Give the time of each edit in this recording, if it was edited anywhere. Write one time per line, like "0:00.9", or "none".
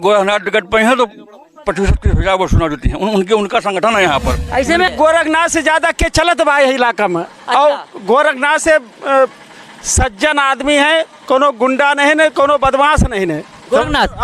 0:04.9